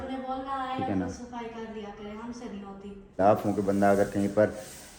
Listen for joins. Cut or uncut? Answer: cut